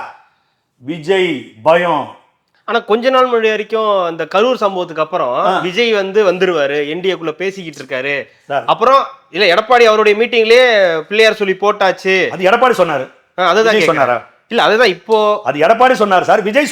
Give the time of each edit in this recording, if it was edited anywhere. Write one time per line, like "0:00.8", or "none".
none